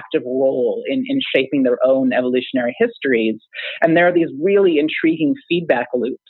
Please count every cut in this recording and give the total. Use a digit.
0